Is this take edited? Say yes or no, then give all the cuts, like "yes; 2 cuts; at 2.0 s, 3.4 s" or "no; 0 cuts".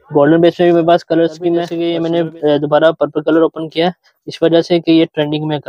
yes; 1 cut; at 1.7 s